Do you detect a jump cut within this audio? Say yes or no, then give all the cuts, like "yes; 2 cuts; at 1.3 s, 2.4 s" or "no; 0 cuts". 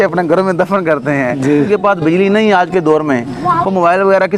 yes; 1 cut; at 1.7 s